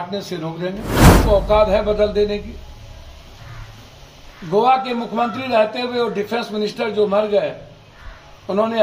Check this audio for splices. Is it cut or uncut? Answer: cut